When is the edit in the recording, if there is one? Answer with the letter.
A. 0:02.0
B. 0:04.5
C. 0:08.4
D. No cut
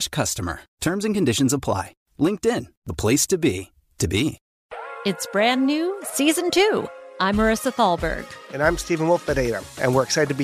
B